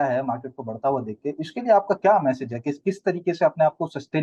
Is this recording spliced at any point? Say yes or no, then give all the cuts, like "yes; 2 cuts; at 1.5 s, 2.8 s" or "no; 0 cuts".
no; 0 cuts